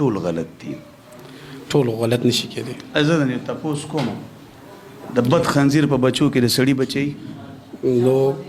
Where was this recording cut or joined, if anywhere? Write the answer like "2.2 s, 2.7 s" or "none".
none

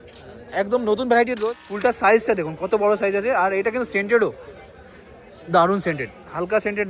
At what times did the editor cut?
1.4 s

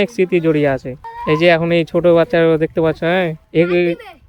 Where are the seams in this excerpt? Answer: none

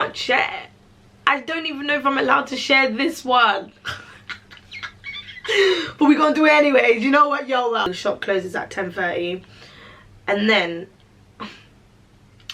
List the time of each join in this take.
7.9 s

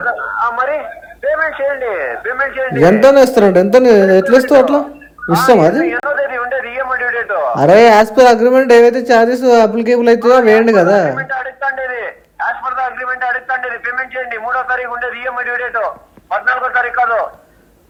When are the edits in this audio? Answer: none

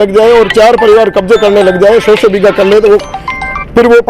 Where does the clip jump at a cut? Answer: none

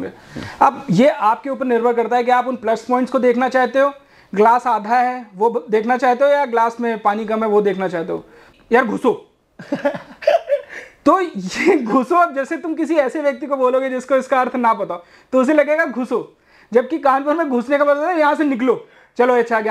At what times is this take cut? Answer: 8.4 s

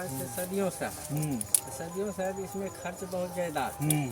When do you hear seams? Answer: none

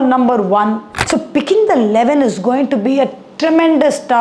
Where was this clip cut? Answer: 0.9 s

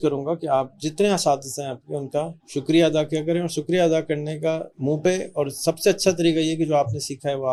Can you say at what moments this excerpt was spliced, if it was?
none

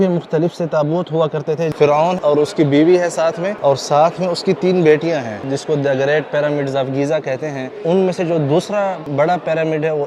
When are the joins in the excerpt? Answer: 2.1 s, 3.5 s, 5.4 s, 7.7 s, 9.0 s

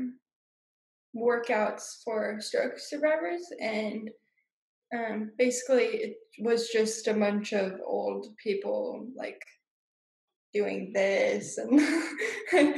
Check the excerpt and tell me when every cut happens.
none

